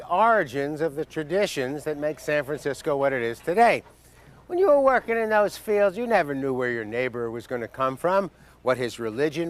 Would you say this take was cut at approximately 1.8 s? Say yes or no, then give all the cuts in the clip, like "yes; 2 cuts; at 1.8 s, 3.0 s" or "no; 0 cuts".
yes; 1 cut; at 1.8 s